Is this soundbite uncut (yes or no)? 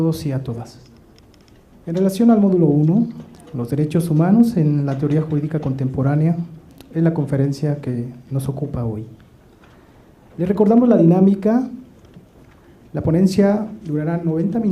no